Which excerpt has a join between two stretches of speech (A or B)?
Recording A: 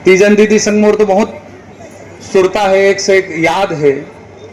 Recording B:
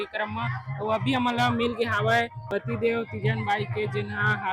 B